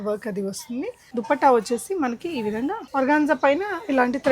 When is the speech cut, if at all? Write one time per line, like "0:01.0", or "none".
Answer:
0:01.1
0:02.8